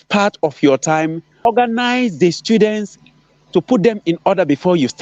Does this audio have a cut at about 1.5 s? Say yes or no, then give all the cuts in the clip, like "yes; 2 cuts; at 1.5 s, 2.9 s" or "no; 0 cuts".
yes; 1 cut; at 1.5 s